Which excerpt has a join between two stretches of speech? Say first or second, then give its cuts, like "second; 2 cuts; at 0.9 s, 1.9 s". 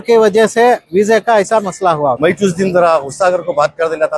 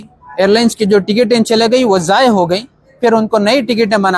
first; 1 cut; at 2.2 s